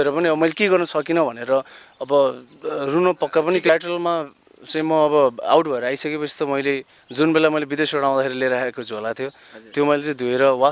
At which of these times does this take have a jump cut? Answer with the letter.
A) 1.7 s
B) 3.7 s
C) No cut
B